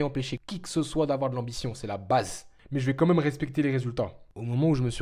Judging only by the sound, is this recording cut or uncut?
cut